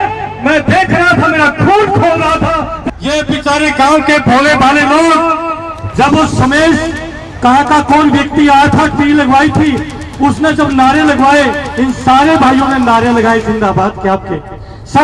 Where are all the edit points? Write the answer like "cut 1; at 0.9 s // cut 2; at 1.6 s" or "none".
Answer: cut 1; at 2.8 s